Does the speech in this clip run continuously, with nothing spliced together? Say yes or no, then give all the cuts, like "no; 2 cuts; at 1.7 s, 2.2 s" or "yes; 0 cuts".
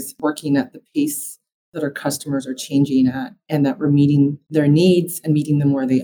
yes; 0 cuts